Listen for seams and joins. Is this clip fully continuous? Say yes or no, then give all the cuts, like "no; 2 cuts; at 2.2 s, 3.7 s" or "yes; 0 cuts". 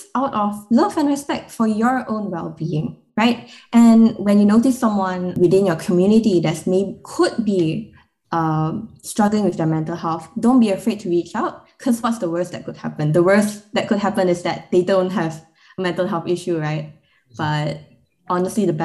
no; 1 cut; at 5.3 s